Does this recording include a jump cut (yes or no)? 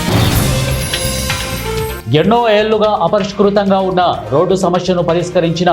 yes